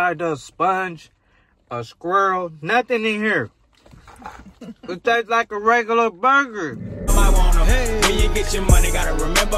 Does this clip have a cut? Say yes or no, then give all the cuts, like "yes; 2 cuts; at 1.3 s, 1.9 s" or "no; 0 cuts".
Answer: yes; 1 cut; at 6.9 s